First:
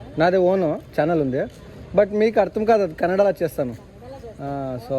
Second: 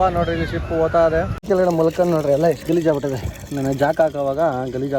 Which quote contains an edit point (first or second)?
second